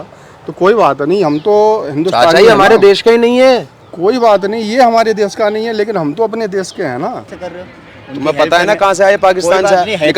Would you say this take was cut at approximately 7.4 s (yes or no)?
yes